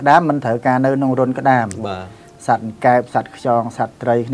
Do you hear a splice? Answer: no; 0 cuts

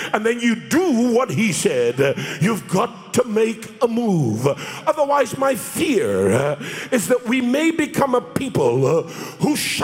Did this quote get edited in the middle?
no; 0 cuts

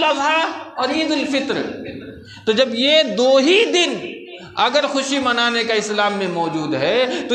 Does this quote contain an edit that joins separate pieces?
no; 0 cuts

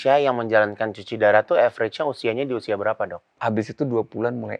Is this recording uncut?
no; 1 cut; at 3.4 s

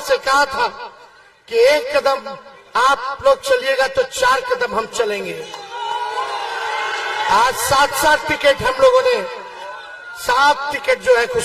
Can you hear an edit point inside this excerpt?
no; 0 cuts

